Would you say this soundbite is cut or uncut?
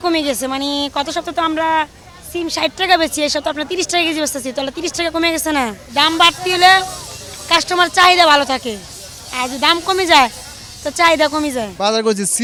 uncut